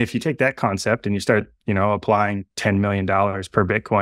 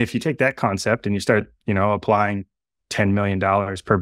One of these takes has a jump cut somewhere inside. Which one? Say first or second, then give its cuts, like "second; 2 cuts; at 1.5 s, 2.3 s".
first; 1 cut; at 2.5 s